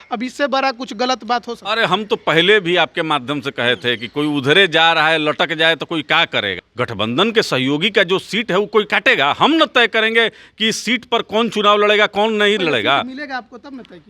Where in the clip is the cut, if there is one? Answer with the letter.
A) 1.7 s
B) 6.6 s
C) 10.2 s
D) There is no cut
B